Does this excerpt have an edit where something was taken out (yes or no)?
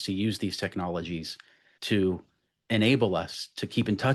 no